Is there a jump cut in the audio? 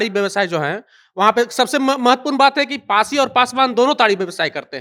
no; 0 cuts

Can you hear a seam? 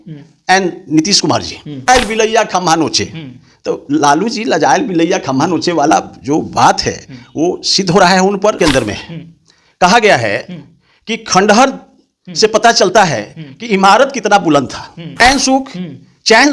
yes; 3 cuts; at 1.9 s, 8.6 s, 15.2 s

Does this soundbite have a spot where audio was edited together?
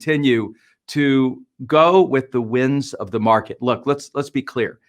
no; 0 cuts

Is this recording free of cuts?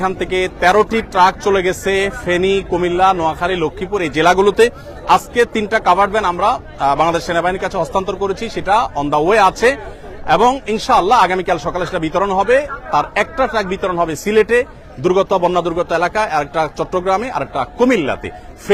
yes; 0 cuts

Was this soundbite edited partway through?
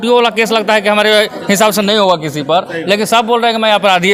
no; 0 cuts

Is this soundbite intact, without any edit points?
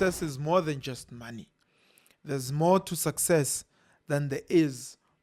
yes; 0 cuts

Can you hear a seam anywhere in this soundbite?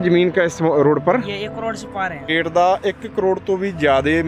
yes; 1 cut; at 2.3 s

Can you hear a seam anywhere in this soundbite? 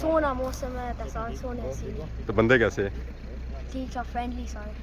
no; 0 cuts

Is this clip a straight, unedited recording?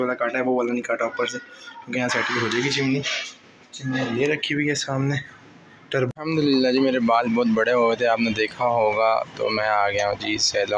no; 1 cut; at 6.1 s

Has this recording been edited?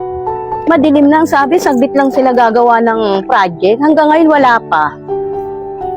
yes; 1 cut; at 5.0 s

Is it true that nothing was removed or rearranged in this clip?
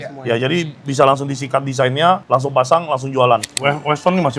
no; 1 cut; at 3.4 s

